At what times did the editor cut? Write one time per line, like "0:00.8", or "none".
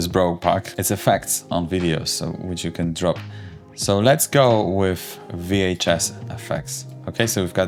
none